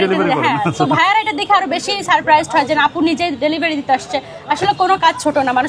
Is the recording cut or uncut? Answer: uncut